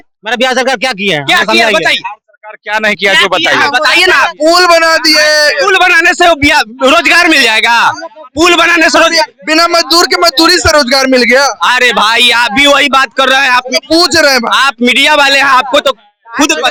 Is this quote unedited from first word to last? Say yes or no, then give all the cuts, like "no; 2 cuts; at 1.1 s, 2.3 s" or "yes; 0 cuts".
yes; 0 cuts